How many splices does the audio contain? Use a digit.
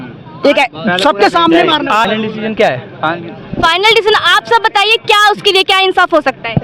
1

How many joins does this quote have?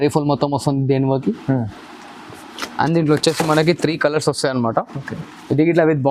0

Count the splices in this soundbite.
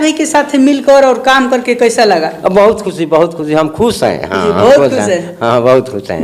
0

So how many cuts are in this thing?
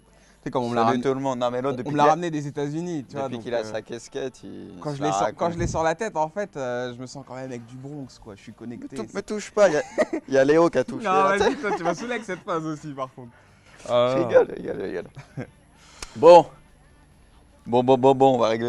0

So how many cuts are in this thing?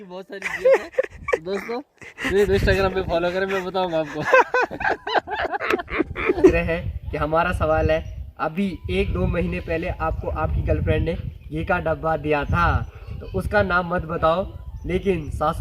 1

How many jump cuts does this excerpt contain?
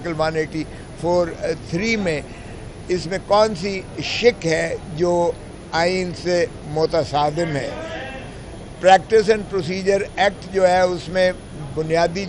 0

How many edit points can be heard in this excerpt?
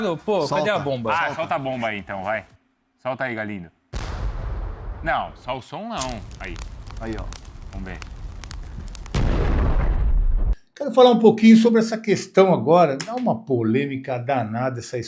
1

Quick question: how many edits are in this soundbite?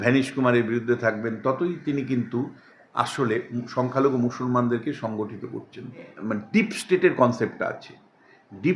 1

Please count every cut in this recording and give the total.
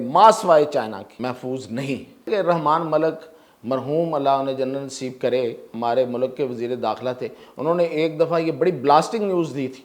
2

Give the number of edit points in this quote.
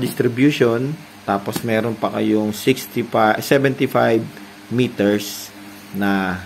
1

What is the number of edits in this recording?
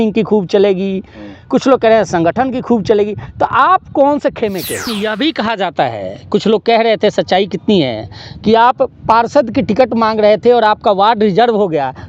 1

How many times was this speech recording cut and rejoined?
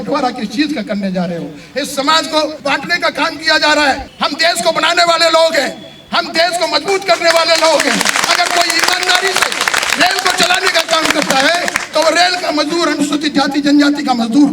1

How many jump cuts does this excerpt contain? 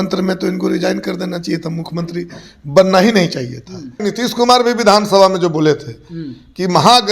1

